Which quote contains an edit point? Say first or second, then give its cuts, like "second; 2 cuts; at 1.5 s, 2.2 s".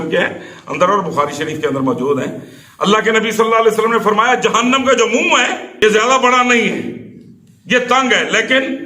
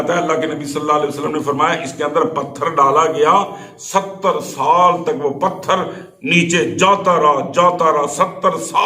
first; 1 cut; at 5.7 s